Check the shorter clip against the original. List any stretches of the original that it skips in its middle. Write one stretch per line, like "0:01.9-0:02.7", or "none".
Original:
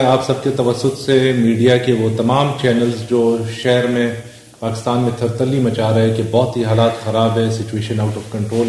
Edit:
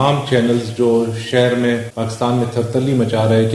0:04.2-0:04.6